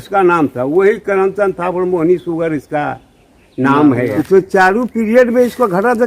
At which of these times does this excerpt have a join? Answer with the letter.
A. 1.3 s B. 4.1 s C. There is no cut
B